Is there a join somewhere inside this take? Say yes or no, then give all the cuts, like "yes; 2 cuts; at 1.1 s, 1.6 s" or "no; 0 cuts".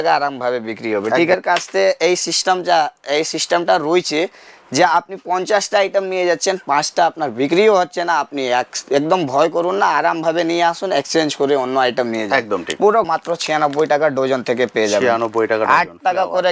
yes; 2 cuts; at 1.3 s, 13.1 s